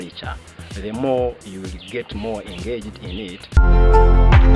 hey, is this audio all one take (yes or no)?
no